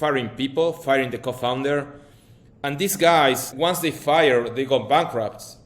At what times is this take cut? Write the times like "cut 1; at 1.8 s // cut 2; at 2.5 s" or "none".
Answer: cut 1; at 3.5 s